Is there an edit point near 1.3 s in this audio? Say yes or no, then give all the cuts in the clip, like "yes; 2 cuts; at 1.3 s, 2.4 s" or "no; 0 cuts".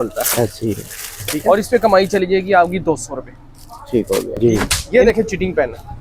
yes; 2 cuts; at 1.3 s, 4.3 s